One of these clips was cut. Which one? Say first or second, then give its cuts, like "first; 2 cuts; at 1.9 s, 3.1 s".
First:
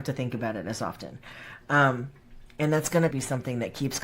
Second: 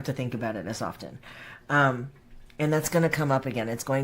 first; 1 cut; at 3.1 s